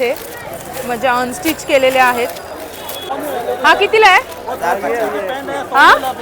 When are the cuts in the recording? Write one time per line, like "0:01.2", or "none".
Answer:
0:03.1